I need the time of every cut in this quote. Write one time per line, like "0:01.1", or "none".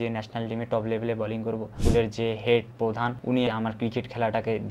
0:01.8